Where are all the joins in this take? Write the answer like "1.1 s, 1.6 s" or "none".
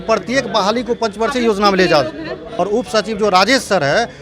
2.4 s